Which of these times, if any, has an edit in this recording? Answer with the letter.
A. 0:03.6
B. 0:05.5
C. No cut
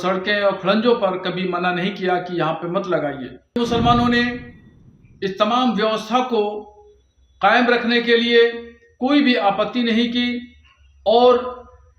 A